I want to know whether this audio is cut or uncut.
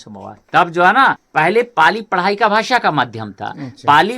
cut